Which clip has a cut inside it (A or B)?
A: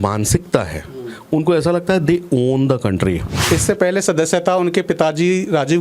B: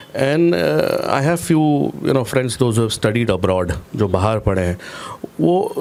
A